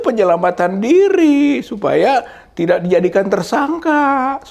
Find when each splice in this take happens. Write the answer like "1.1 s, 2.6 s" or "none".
none